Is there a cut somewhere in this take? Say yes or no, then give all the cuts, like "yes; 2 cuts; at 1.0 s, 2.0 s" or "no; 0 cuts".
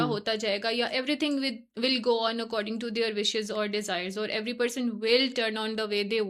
no; 0 cuts